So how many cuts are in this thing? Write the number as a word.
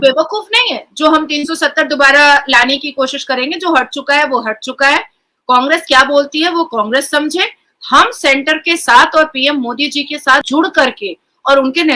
one